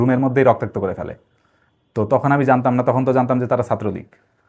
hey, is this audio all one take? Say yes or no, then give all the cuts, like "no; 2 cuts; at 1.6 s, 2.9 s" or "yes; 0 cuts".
yes; 0 cuts